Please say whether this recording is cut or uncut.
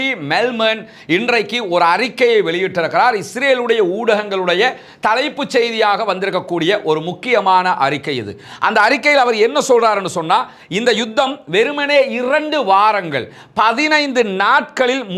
uncut